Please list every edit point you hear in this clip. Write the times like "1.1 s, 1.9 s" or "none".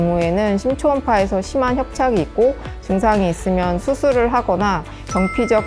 none